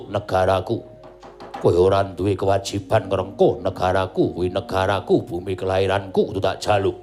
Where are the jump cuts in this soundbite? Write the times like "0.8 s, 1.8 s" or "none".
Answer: none